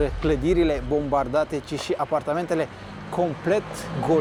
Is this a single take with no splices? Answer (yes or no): yes